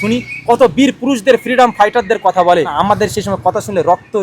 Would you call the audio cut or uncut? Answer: cut